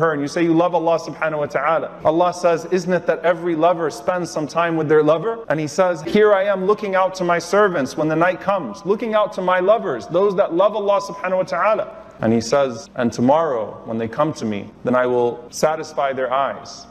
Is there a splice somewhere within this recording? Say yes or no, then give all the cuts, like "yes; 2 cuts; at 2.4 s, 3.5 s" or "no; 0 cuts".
yes; 4 cuts; at 5.4 s, 12.8 s, 14.7 s, 15.4 s